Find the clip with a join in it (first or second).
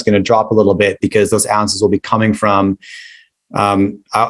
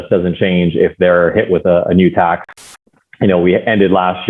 second